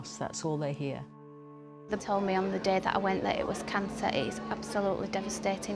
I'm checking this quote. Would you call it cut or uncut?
cut